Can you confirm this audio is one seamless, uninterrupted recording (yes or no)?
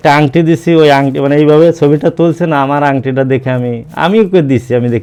yes